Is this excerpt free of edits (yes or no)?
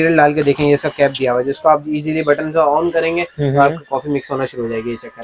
yes